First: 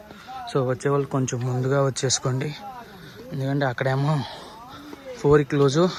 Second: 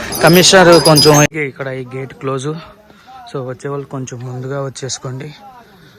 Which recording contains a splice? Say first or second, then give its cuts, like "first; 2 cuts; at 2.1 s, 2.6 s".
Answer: second; 1 cut; at 1.3 s